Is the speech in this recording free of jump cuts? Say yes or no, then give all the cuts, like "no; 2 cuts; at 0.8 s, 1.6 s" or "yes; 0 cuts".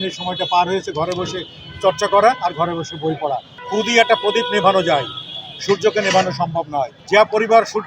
no; 2 cuts; at 3.6 s, 7.0 s